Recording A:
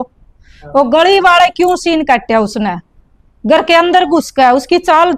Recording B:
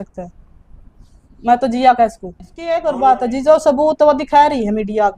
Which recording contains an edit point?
B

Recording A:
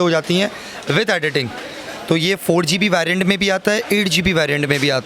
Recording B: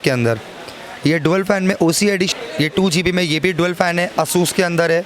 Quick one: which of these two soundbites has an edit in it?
B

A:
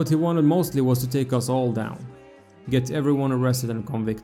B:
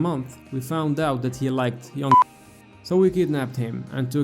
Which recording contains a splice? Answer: B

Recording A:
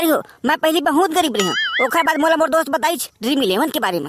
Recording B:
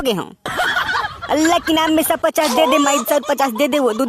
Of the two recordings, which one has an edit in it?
B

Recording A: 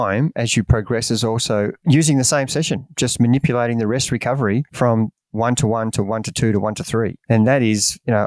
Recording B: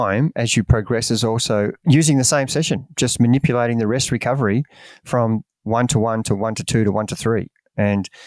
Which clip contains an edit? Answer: A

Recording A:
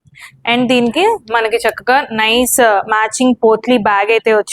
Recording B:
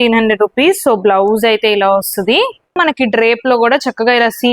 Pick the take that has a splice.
B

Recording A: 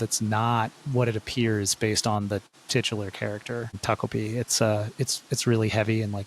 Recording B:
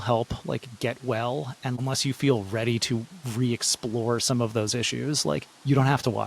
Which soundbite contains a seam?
B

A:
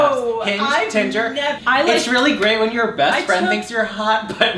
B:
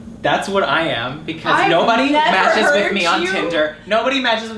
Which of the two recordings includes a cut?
A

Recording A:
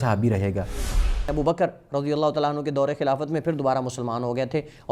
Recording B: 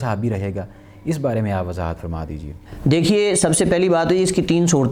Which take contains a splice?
A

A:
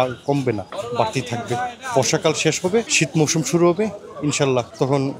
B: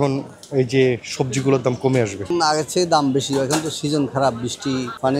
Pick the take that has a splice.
B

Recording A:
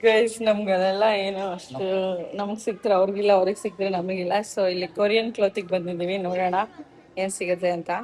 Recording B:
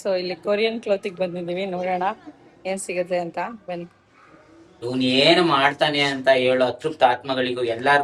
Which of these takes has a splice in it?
B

